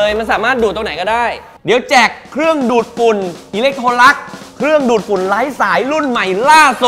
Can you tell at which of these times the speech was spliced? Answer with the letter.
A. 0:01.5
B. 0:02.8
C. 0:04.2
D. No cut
A